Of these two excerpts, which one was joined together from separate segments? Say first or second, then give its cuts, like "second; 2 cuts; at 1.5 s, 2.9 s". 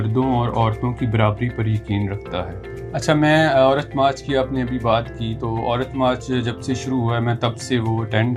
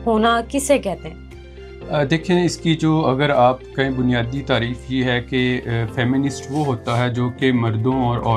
first; 1 cut; at 2.6 s